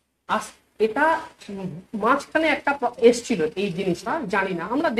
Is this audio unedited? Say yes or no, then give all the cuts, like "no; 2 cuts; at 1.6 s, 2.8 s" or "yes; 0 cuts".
no; 1 cut; at 4.1 s